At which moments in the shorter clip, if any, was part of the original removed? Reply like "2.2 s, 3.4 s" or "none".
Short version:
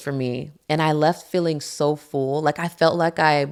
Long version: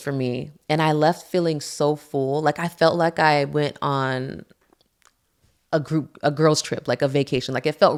none